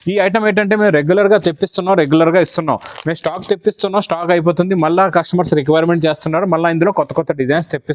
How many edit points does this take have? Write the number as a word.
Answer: zero